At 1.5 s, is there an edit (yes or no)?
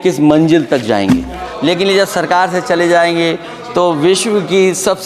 yes